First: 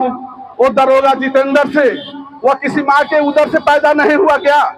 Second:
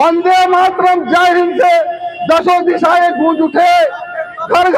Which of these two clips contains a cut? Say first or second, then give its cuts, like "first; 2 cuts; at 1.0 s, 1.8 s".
first; 1 cut; at 2.2 s